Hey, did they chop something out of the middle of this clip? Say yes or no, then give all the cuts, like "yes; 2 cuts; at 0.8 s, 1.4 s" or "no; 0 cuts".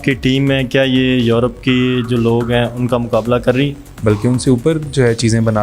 yes; 1 cut; at 3.9 s